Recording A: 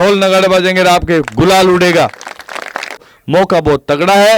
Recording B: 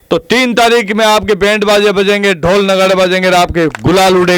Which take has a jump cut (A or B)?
A